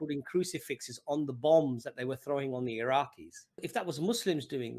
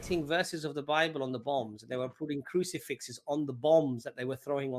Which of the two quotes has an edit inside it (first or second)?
first